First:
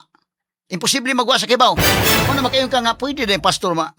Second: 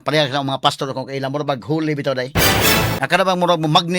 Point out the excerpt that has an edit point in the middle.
second; 1 cut; at 3.0 s

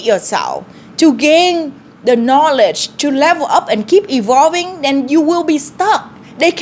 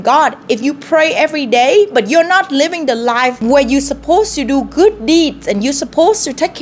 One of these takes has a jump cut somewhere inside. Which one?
second; 1 cut; at 3.4 s

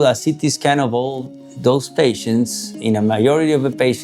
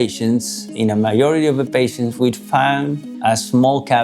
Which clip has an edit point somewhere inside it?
second; 1 cut; at 3.1 s

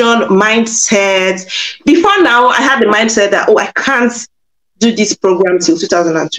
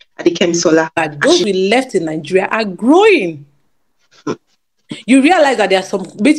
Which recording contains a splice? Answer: second; 1 cut; at 1.0 s

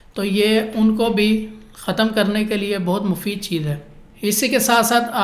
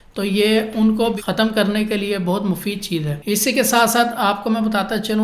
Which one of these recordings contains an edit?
second; 2 cuts; at 1.2 s, 3.1 s

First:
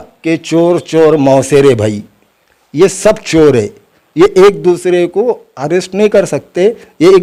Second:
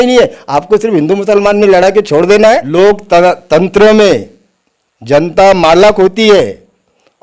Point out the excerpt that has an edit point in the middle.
second; 1 cut; at 2.7 s

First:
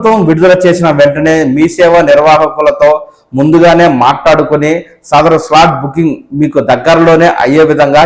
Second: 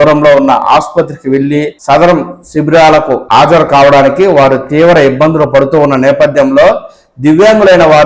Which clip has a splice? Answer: second; 2 cuts; at 1.7 s, 3.2 s

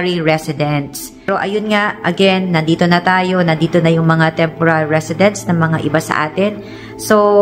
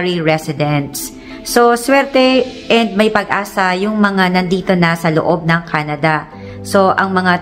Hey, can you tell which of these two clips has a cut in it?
first; 1 cut; at 1.3 s

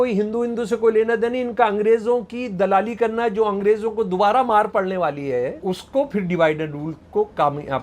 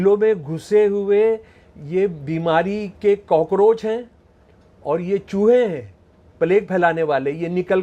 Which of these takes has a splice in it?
first; 1 cut; at 5.6 s

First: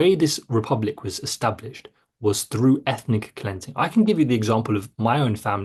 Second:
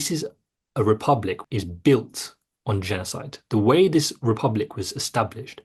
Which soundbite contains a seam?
second; 1 cut; at 1.4 s

